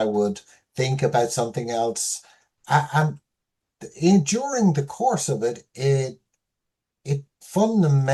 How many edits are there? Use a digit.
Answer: 0